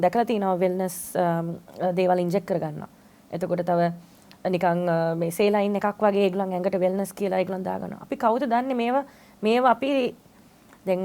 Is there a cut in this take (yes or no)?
no